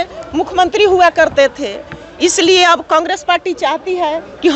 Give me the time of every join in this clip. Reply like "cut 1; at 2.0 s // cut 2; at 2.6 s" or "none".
none